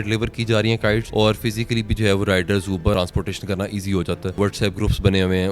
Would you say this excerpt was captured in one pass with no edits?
no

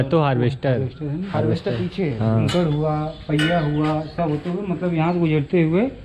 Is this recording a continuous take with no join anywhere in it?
no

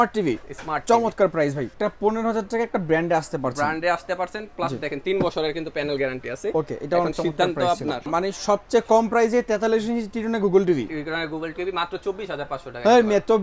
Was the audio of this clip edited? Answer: yes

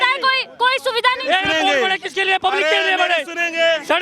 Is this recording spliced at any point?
no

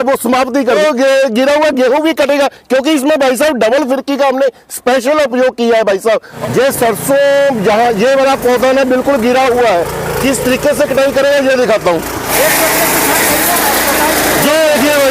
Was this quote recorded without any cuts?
no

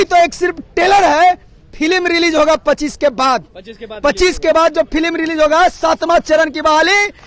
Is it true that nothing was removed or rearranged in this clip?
yes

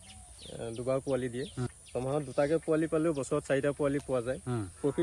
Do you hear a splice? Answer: yes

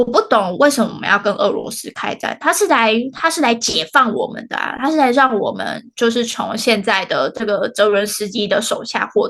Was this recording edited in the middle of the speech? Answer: no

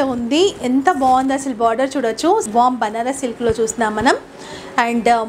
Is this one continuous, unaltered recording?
no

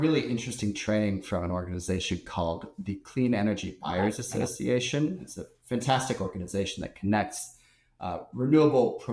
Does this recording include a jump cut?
no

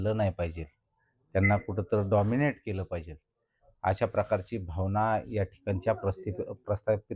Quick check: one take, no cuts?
yes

